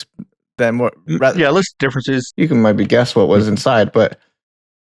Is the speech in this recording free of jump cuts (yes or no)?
no